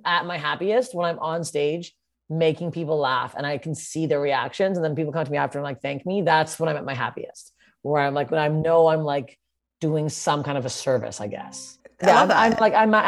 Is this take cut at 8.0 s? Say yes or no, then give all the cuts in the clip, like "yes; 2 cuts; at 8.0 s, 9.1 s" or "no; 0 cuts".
no; 0 cuts